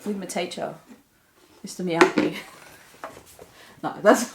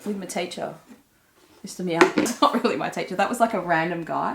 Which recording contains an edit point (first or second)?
second